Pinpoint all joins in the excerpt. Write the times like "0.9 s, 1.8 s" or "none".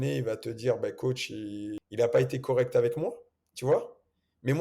1.8 s